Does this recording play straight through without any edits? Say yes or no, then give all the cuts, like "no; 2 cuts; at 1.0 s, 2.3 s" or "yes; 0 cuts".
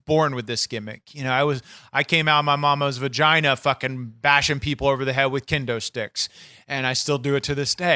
yes; 0 cuts